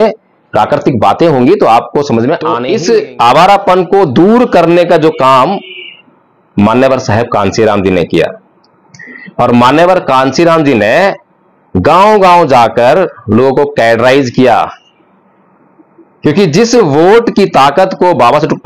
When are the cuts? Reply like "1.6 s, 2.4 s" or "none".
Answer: 2.6 s